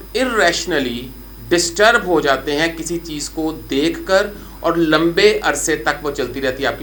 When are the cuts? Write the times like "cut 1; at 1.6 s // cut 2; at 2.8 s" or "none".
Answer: none